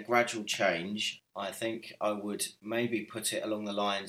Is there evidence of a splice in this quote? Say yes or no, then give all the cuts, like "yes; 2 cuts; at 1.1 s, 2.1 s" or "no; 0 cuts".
no; 0 cuts